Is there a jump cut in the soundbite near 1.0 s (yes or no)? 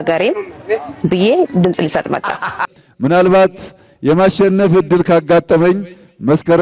no